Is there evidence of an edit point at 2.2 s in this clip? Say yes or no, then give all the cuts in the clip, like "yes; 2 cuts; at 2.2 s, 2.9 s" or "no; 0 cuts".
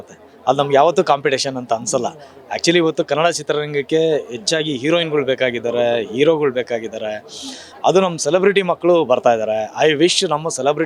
no; 0 cuts